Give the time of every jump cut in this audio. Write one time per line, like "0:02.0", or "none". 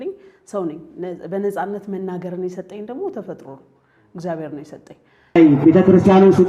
0:05.4